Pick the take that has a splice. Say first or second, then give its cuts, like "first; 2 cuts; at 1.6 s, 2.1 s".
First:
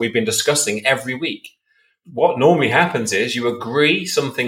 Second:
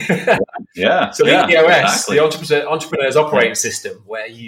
first; 1 cut; at 2.0 s